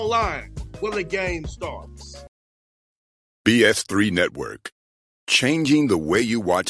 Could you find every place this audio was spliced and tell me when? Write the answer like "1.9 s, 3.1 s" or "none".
2.2 s